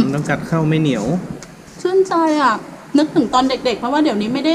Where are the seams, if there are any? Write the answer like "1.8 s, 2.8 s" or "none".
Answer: none